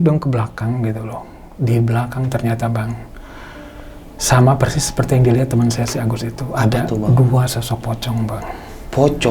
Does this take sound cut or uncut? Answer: uncut